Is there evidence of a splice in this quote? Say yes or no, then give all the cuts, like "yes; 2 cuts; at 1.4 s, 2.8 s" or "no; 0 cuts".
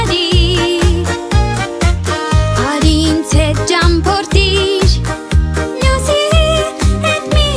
no; 0 cuts